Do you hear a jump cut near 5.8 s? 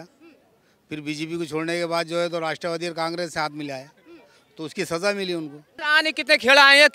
yes; 1 cut; at 5.8 s

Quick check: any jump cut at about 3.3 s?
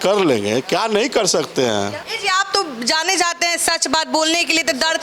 no; 1 cut; at 2.0 s

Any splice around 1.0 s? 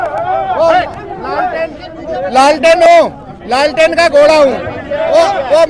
no; 0 cuts

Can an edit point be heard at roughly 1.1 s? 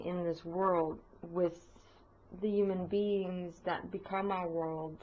yes; 1 cut; at 1.1 s

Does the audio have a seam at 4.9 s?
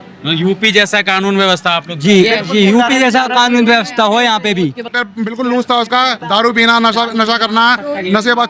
yes; 1 cut; at 4.9 s

